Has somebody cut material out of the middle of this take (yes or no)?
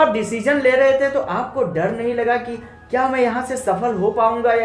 no